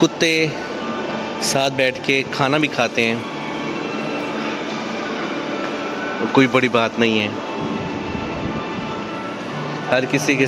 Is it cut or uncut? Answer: uncut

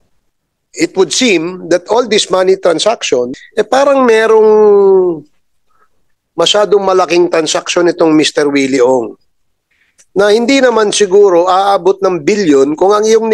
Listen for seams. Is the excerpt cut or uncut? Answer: cut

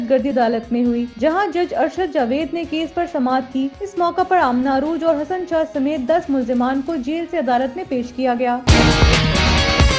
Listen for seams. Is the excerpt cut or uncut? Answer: cut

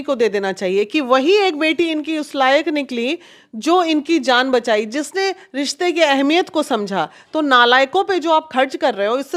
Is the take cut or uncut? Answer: uncut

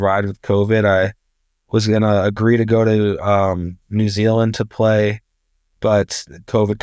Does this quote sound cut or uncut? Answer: uncut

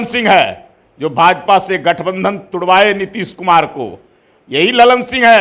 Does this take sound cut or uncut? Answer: uncut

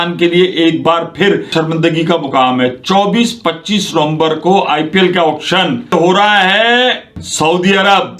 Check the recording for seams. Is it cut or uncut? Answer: cut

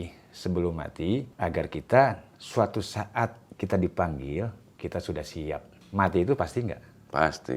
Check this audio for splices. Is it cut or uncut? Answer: cut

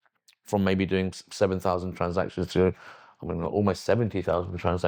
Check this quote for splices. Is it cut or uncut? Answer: uncut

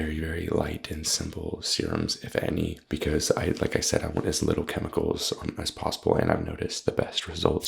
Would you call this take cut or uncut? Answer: cut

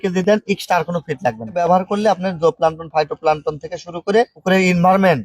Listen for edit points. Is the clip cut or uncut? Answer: cut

